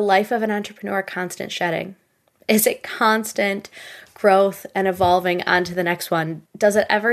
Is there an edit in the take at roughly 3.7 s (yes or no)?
no